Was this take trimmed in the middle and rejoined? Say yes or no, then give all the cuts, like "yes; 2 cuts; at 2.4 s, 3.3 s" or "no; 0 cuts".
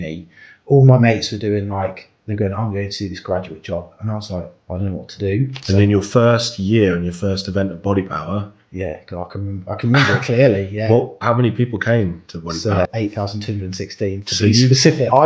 yes; 3 cuts; at 4.6 s, 5.5 s, 12.9 s